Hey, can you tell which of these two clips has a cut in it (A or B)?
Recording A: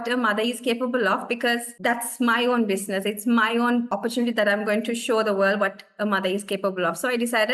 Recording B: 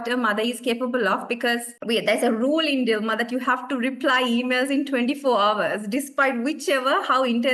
B